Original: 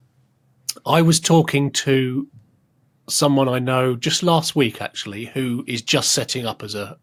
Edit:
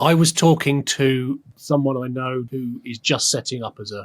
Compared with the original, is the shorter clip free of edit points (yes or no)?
no